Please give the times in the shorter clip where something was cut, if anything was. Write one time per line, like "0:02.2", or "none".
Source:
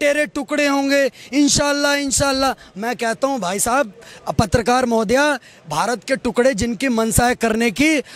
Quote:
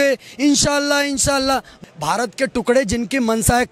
0:01.8